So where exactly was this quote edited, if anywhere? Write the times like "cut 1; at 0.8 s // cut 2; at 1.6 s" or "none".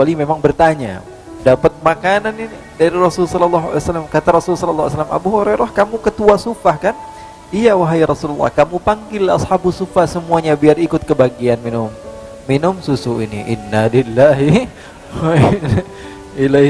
cut 1; at 1.2 s